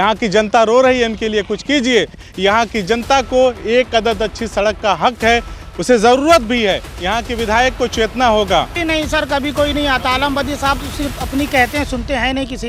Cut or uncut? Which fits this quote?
cut